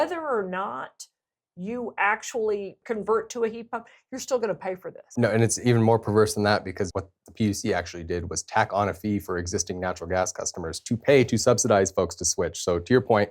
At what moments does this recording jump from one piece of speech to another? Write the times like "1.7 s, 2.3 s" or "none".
2.8 s, 5.0 s, 6.9 s